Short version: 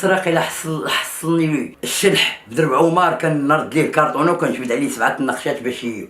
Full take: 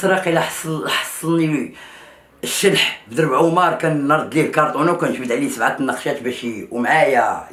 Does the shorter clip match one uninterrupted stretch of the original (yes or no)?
no